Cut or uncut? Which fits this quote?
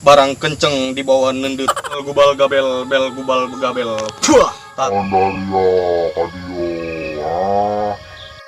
cut